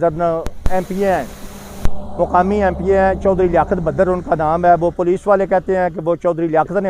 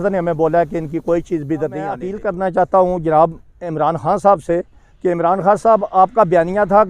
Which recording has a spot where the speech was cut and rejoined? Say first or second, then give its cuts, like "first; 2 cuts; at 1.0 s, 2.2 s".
second; 1 cut; at 2.1 s